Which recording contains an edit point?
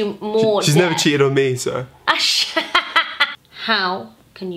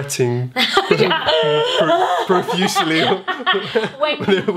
first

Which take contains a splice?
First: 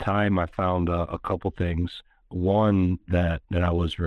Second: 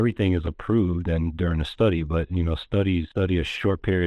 second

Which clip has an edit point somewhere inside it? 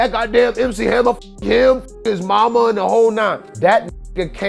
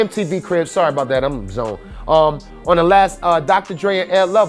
first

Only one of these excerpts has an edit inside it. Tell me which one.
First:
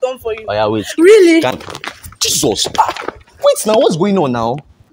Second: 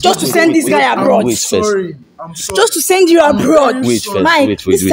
first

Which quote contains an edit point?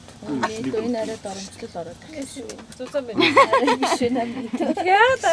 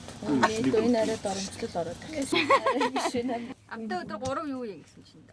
second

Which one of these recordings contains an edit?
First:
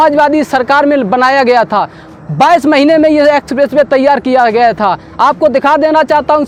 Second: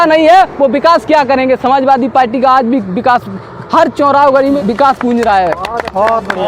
second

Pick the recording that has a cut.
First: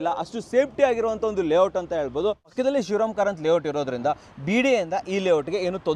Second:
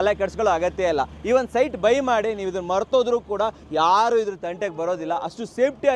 first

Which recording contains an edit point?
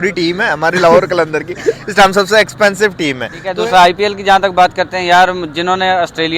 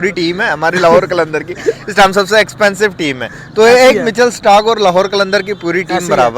first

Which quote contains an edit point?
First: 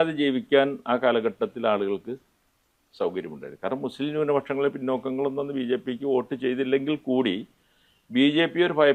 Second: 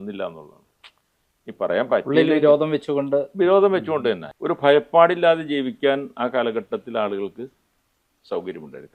second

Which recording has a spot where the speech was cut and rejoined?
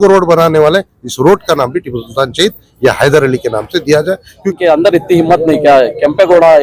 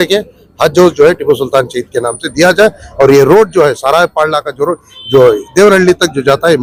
first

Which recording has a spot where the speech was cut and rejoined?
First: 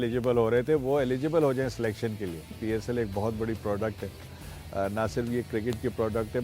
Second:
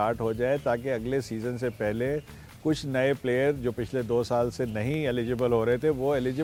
first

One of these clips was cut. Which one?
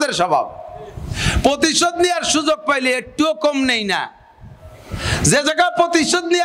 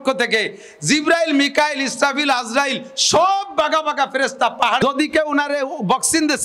second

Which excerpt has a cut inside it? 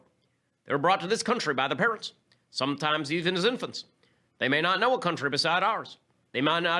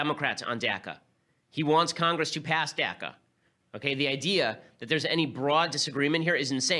second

